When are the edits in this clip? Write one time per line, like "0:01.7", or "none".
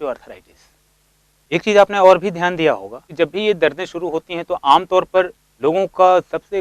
0:03.0
0:05.4